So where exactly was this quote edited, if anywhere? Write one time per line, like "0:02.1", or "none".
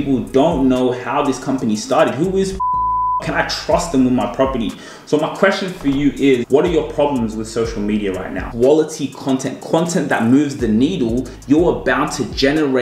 0:06.4
0:08.4
0:11.3